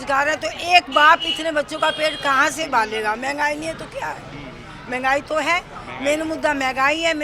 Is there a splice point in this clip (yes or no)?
no